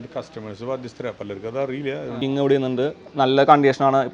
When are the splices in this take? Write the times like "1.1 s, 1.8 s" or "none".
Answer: 2.2 s